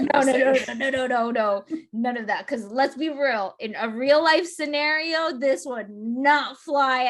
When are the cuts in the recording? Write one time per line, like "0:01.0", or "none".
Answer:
none